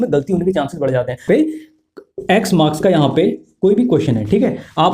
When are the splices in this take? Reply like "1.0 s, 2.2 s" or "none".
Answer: 1.3 s